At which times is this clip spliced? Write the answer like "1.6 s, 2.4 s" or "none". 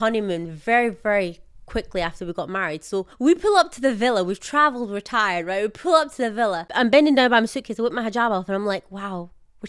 3.1 s, 6.7 s